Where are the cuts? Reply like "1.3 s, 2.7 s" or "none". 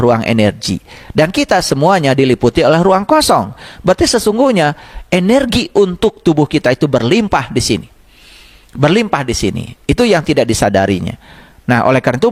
none

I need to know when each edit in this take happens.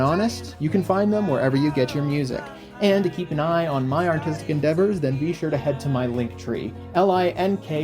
6.8 s

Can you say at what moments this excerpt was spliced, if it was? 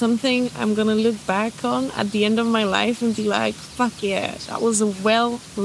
none

